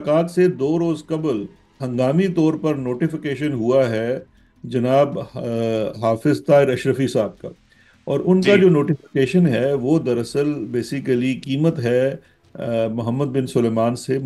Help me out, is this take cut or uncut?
uncut